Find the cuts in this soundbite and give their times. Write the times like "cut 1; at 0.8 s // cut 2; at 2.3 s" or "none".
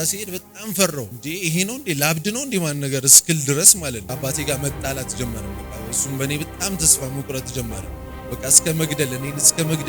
cut 1; at 1.1 s // cut 2; at 4.0 s